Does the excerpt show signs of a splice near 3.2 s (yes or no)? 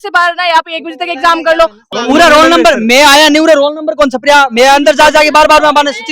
no